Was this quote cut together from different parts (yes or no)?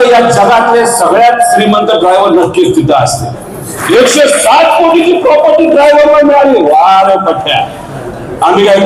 yes